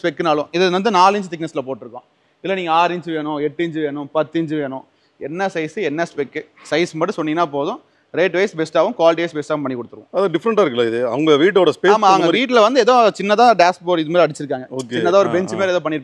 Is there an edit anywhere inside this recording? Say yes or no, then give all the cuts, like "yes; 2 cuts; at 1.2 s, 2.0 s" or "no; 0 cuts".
no; 0 cuts